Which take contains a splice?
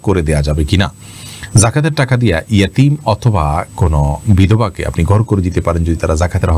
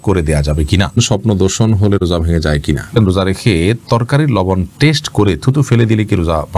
second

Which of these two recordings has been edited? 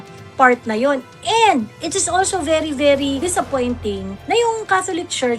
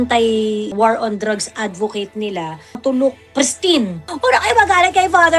second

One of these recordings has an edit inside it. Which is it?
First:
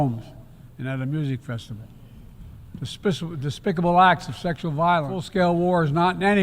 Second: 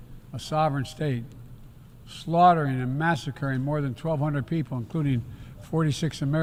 first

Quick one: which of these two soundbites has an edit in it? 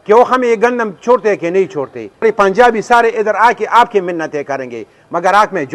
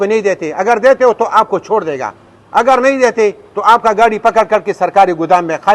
first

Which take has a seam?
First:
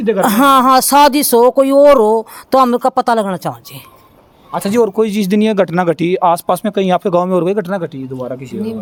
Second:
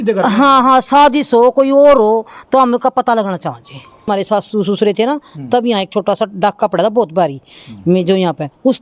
second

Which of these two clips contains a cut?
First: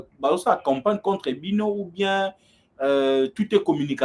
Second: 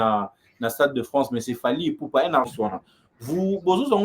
second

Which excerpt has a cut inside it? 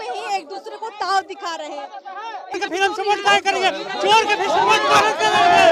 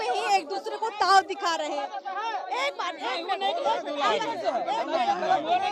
first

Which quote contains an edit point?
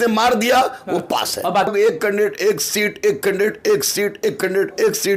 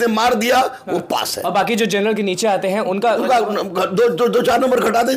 first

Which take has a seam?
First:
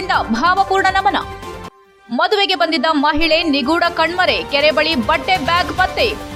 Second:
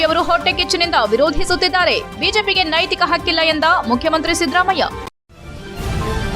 second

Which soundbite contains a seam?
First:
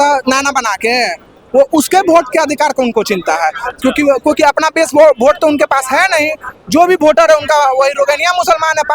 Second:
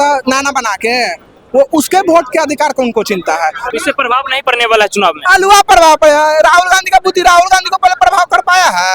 second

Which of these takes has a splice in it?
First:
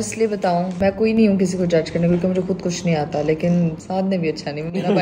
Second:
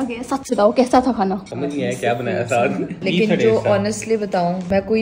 second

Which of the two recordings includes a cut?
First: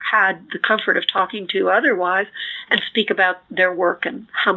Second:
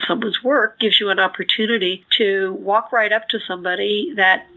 second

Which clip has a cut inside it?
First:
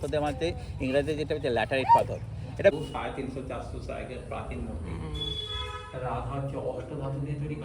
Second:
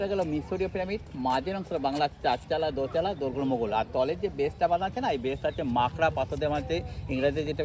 first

